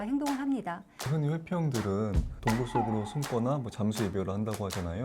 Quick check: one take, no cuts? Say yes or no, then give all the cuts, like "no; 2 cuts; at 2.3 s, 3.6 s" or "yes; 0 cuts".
no; 1 cut; at 0.9 s